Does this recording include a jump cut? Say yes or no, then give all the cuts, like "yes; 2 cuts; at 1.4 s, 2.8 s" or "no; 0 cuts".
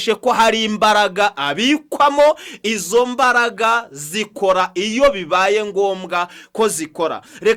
no; 0 cuts